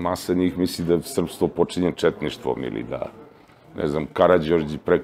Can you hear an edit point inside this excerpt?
no; 0 cuts

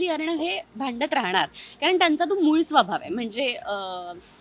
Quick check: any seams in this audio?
no; 0 cuts

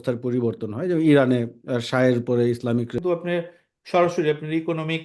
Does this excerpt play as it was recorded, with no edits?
no; 1 cut; at 3.0 s

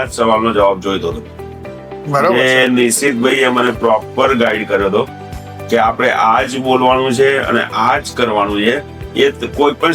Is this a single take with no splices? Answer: yes; 0 cuts

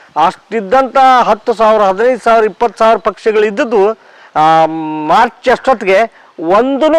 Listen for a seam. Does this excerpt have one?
no; 0 cuts

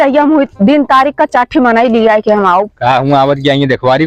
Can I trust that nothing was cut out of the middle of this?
yes; 0 cuts

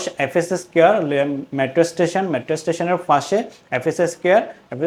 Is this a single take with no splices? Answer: yes; 0 cuts

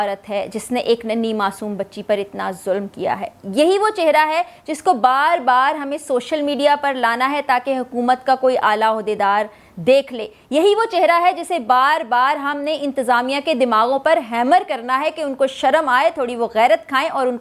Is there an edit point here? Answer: no; 0 cuts

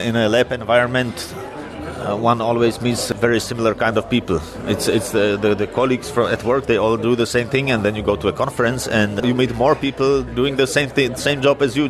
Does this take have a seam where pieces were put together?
yes; 1 cut; at 9.2 s

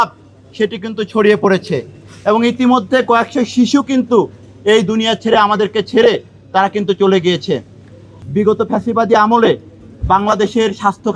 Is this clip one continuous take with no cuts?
no; 1 cut; at 8.2 s

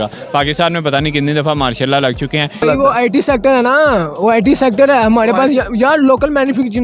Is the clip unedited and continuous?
no; 1 cut; at 2.6 s

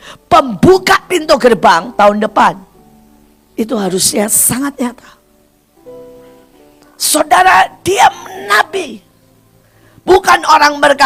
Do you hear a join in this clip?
no; 0 cuts

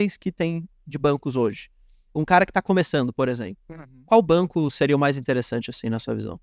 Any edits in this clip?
no; 0 cuts

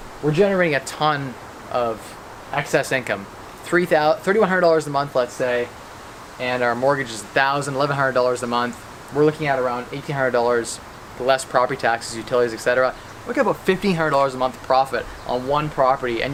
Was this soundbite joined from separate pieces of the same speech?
no; 0 cuts

